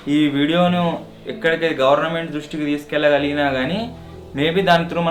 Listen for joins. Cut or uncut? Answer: uncut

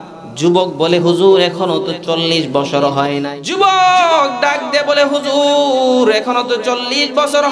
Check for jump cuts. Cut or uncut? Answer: cut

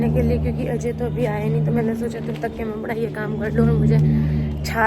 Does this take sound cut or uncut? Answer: uncut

